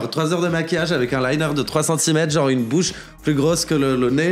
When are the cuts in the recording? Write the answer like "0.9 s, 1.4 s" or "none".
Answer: none